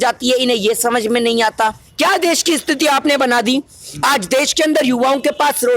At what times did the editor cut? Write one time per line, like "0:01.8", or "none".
0:01.8